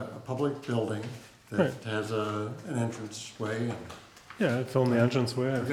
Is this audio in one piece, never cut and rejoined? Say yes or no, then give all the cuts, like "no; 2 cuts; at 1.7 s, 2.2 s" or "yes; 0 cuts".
yes; 0 cuts